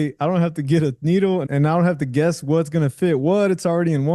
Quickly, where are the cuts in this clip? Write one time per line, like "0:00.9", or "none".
0:01.5